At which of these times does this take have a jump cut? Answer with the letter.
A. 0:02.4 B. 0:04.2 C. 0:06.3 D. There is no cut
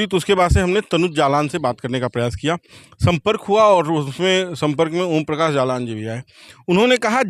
D